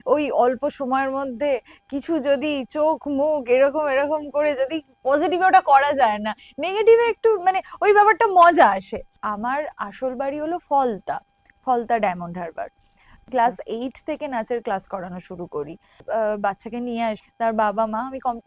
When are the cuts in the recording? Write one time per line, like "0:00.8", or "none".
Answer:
0:09.2
0:13.3
0:16.0
0:17.2